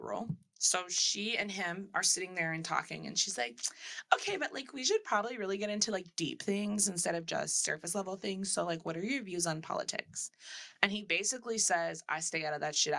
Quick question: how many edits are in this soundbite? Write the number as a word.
zero